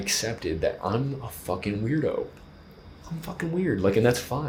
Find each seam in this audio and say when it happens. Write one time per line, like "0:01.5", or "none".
none